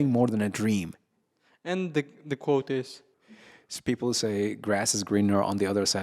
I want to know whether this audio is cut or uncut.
cut